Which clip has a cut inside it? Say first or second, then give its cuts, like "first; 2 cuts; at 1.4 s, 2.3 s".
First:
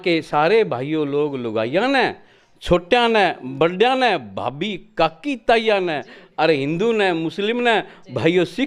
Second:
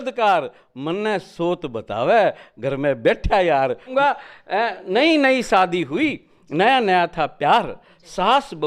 second; 1 cut; at 3.9 s